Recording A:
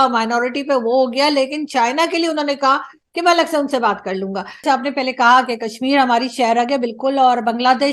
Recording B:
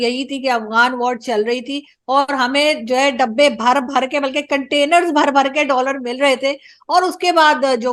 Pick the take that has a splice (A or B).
A